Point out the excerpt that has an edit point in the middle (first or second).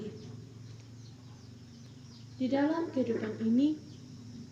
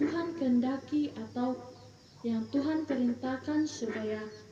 first